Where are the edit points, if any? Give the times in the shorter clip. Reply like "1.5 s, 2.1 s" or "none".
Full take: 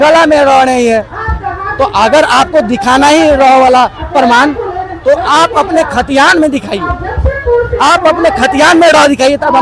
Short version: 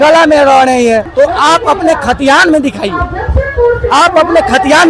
1.1 s

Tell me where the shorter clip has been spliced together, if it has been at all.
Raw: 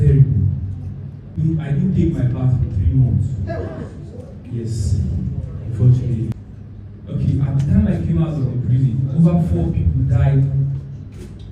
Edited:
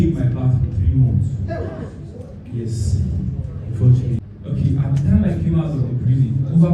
4.2 s

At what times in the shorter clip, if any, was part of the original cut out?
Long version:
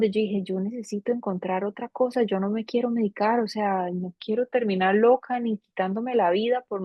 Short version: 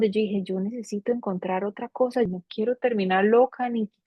2.3 s

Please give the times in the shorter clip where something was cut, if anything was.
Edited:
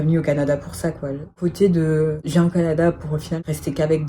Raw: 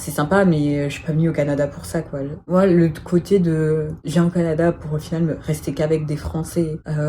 1.3 s, 2.2 s, 3.4 s

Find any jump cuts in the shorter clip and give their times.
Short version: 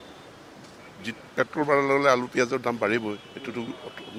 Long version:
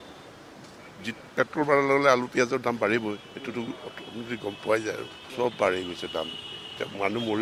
none

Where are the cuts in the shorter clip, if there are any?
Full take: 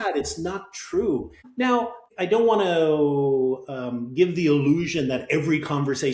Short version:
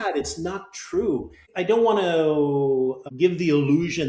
1.4 s, 3.0 s

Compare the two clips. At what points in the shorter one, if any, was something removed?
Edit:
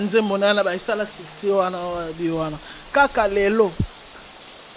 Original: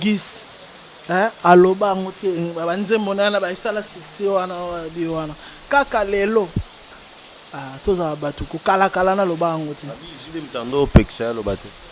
none

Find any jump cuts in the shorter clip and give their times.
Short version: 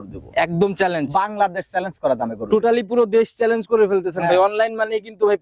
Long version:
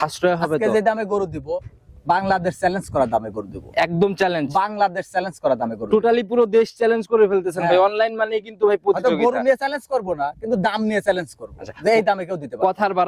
none

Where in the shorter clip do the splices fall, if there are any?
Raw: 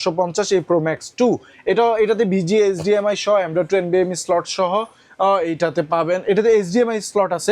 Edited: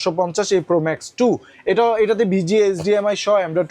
none

